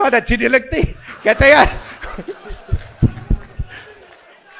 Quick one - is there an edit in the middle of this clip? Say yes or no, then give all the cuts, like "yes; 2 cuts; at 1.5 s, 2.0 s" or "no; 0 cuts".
no; 0 cuts